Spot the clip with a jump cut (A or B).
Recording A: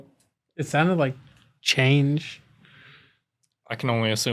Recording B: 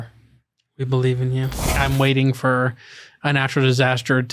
B